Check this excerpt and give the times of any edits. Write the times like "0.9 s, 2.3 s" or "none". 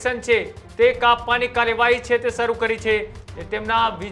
3.2 s

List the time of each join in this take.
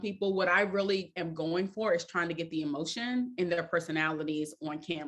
none

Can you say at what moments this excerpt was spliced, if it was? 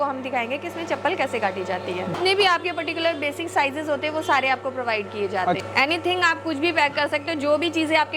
2.1 s, 5.6 s

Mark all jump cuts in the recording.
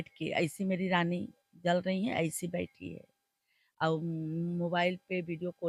none

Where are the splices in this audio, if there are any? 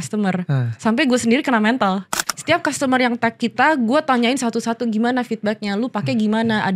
2.2 s

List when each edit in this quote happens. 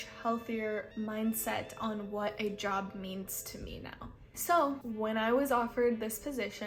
none

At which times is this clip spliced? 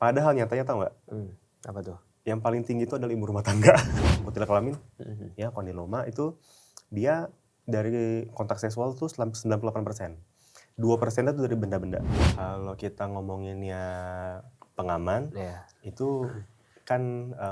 4.0 s, 12.2 s

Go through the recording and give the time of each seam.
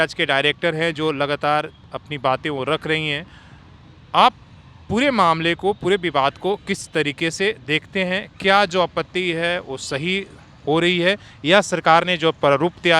none

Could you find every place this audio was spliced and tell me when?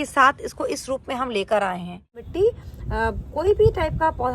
2.2 s

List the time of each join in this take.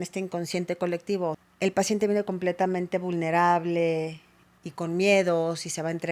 1.5 s

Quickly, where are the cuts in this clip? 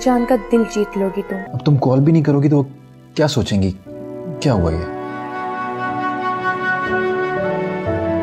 1.4 s

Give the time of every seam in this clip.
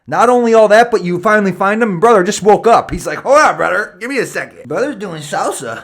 4.6 s

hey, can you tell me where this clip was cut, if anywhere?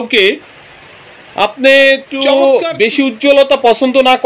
2.3 s

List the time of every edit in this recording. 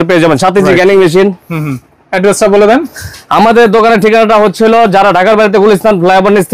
none

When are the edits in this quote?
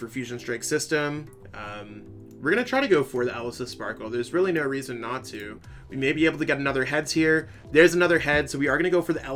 none

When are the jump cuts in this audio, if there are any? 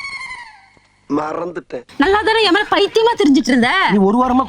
1.8 s

